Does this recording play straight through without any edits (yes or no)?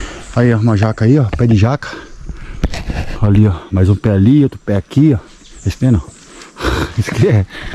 yes